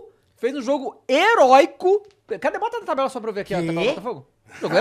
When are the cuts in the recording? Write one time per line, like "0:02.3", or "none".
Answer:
none